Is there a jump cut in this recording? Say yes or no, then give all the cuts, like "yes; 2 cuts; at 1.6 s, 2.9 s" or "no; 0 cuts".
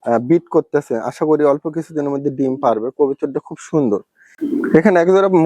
yes; 1 cut; at 4.2 s